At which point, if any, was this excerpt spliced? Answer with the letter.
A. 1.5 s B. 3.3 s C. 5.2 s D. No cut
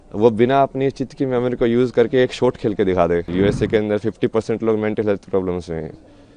B